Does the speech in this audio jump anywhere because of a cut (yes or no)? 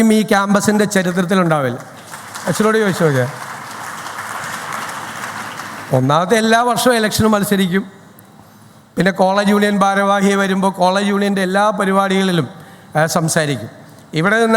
no